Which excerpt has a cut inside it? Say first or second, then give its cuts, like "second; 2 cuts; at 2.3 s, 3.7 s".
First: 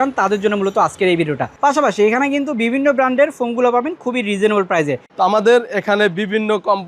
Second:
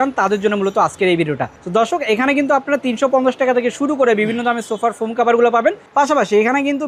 first; 2 cuts; at 1.5 s, 5.0 s